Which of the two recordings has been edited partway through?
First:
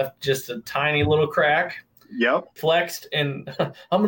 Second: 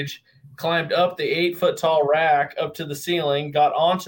first; 1 cut; at 2.5 s

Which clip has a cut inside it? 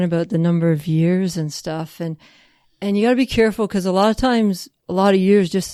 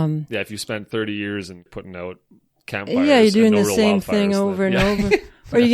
second; 1 cut; at 1.6 s

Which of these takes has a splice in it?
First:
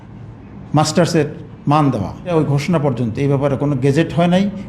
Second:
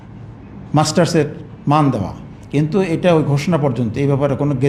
first; 1 cut; at 2.3 s

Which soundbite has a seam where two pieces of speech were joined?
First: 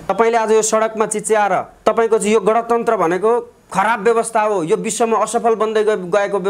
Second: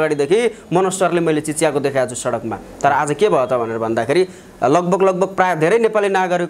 first; 1 cut; at 1.7 s

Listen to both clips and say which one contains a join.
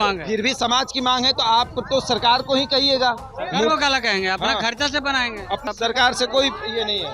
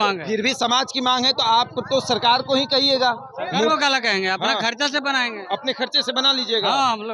first; 1 cut; at 5.6 s

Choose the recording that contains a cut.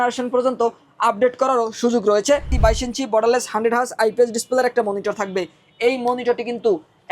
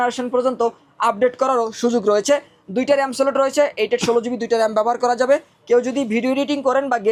first; 1 cut; at 2.5 s

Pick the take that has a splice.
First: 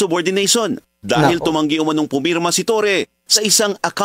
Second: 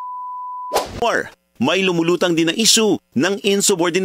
second; 1 cut; at 1.0 s

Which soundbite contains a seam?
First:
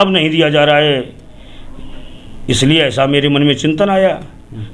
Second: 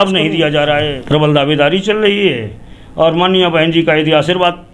second; 1 cut; at 1.0 s

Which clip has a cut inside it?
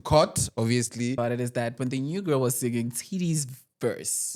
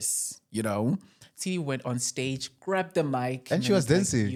first; 1 cut; at 1.2 s

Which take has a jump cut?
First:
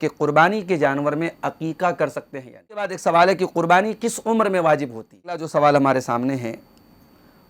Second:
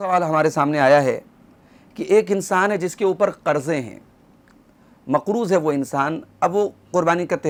first; 2 cuts; at 2.9 s, 5.5 s

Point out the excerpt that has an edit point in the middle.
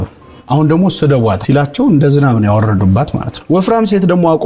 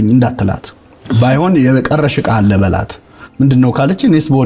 first; 2 cuts; at 1.4 s, 3.3 s

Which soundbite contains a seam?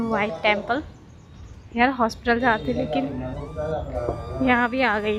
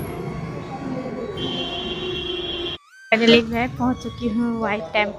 second; 1 cut; at 2.9 s

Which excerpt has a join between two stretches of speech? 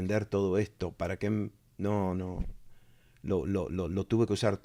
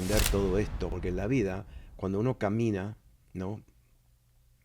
second; 1 cut; at 0.9 s

